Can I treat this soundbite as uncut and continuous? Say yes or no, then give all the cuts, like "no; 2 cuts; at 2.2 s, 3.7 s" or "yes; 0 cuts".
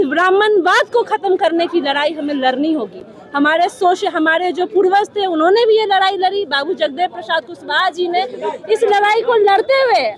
yes; 0 cuts